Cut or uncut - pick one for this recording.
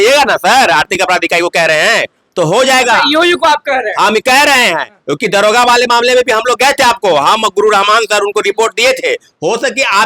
uncut